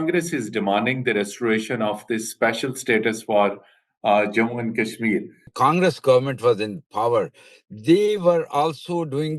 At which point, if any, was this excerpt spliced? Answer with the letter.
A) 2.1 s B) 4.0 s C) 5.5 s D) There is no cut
C